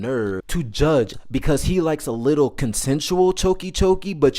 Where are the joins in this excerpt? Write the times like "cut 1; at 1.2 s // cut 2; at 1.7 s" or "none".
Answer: cut 1; at 1.2 s

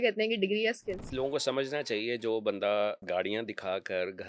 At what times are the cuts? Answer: cut 1; at 1.1 s // cut 2; at 3.0 s

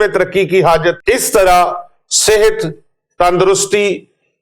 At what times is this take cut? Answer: cut 1; at 1.0 s

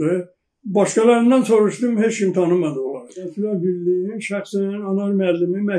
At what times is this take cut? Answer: cut 1; at 3.3 s

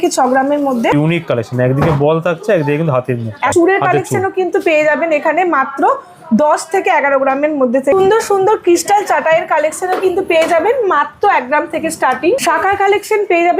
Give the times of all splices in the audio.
cut 1; at 0.9 s // cut 2; at 3.5 s // cut 3; at 7.9 s // cut 4; at 12.4 s

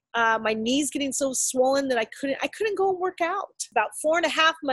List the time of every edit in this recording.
cut 1; at 3.7 s

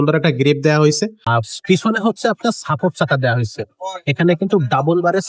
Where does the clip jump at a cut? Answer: cut 1; at 1.2 s

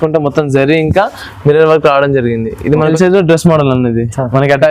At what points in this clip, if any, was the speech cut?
cut 1; at 2.9 s

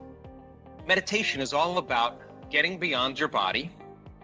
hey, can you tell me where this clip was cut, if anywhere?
none

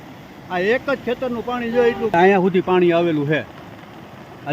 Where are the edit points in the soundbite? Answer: cut 1; at 2.1 s

